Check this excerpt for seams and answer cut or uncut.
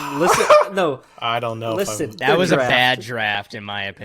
cut